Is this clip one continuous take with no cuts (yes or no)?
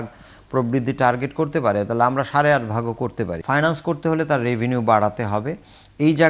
no